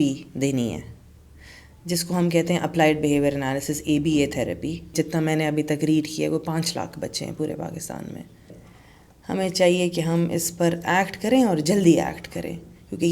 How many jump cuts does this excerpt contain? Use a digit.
2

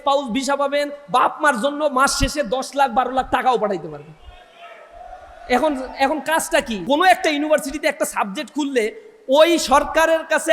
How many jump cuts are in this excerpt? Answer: 1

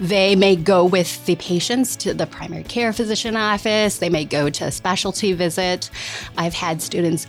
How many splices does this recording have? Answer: 1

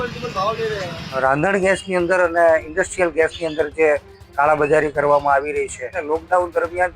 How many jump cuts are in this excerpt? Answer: 2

